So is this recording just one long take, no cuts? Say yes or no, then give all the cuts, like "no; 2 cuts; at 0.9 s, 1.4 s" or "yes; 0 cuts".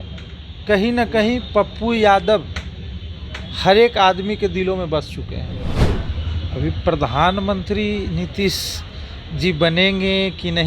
no; 1 cut; at 5.8 s